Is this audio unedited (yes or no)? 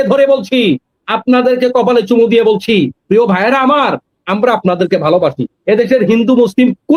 yes